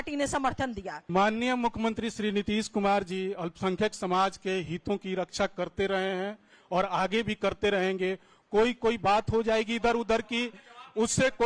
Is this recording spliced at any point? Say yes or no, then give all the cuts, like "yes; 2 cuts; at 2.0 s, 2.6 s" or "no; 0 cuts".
yes; 1 cut; at 1.0 s